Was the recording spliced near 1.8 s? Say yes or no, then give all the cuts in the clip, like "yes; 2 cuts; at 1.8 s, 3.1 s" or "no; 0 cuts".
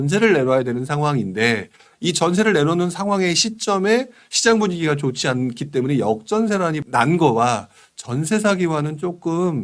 no; 0 cuts